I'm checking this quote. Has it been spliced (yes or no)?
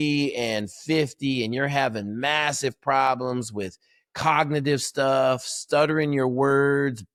no